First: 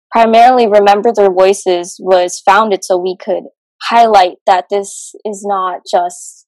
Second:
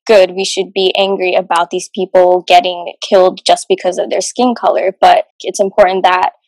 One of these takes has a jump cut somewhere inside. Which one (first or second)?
second